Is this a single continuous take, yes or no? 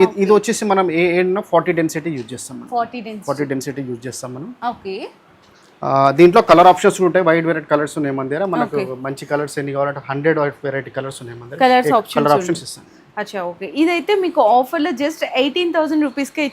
yes